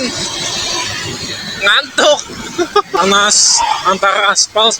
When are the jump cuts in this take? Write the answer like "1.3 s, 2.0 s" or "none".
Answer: 3.0 s